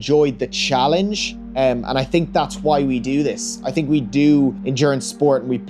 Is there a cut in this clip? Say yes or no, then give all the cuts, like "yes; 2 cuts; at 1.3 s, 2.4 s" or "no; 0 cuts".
yes; 1 cut; at 4.6 s